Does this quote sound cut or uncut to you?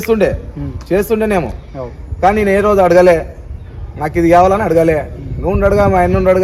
uncut